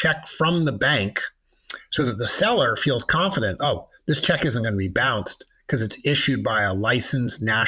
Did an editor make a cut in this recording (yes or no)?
no